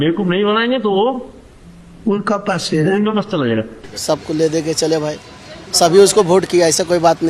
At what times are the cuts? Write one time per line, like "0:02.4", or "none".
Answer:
0:03.7

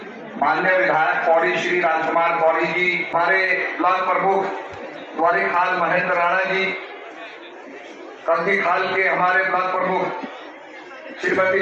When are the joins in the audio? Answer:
0:03.1

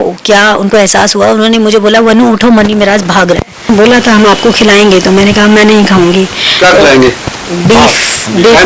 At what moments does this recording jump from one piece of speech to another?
0:03.7

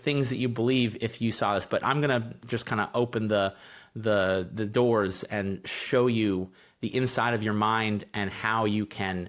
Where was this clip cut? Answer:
none

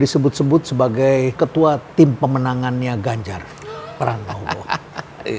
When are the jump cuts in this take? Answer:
0:01.3

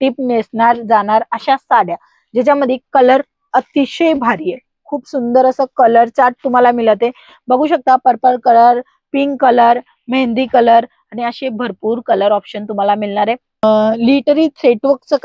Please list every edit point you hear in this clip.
0:13.6

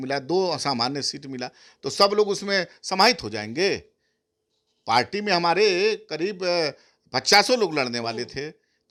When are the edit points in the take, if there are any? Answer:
none

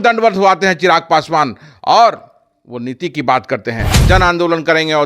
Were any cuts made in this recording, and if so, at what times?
0:03.9

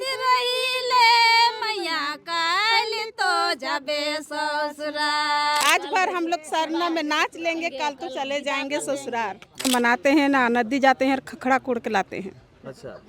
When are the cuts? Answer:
0:05.6
0:09.7

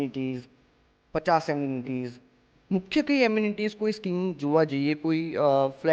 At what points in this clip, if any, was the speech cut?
none

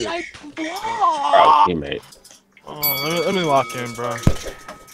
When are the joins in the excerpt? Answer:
none

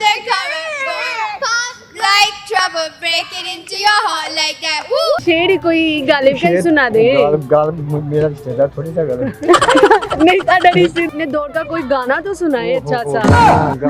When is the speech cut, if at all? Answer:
0:05.2
0:11.1

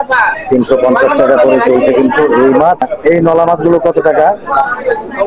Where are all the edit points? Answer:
0:02.9

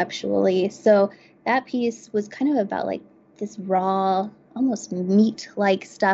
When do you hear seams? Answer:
none

